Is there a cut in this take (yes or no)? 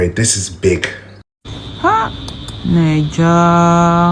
yes